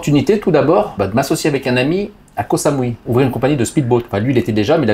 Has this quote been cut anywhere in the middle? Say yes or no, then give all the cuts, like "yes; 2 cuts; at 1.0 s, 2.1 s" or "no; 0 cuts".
yes; 2 cuts; at 1.0 s, 3.0 s